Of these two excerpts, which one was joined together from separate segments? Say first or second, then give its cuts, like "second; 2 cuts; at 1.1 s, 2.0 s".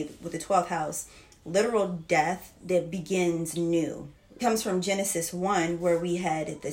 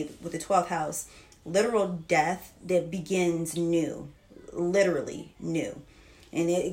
first; 1 cut; at 4.3 s